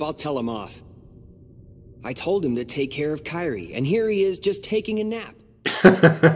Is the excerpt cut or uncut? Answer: uncut